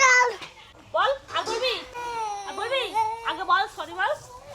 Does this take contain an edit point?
yes; 1 cut; at 1.9 s

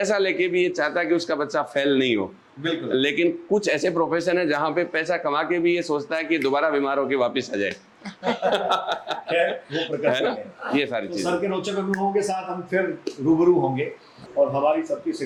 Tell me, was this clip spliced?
no; 0 cuts

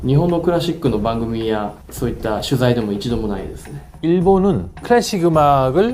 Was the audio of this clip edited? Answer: yes; 1 cut; at 3.9 s

